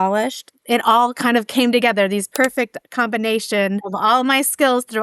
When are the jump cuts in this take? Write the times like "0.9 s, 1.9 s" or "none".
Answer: 2.3 s, 3.8 s